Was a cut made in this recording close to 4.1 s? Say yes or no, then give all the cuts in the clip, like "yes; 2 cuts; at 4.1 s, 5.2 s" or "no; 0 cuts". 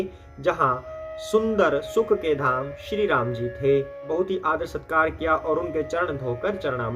yes; 1 cut; at 4.1 s